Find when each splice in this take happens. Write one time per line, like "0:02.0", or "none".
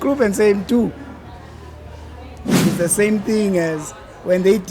0:02.6